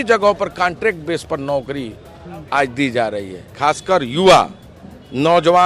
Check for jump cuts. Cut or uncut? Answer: cut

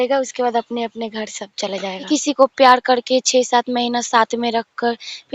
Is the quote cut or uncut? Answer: cut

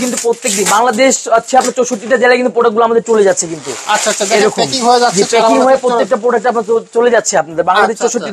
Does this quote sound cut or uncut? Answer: uncut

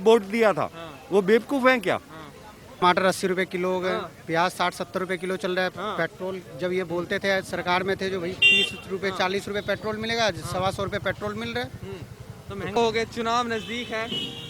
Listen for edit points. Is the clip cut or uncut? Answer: cut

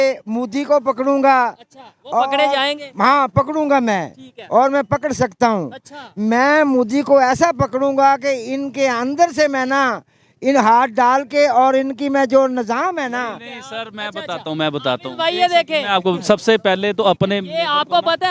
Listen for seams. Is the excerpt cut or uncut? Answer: uncut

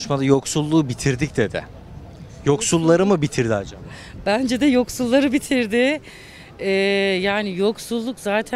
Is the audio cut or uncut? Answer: uncut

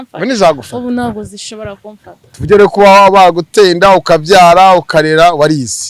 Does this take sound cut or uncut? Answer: uncut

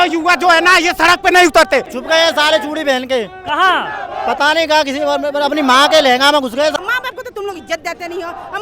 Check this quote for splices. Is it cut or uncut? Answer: cut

